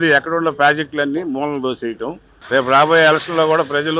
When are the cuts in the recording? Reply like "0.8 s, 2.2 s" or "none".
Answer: 2.3 s